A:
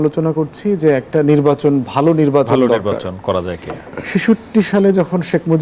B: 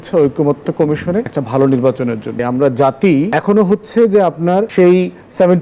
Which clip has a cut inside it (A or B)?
B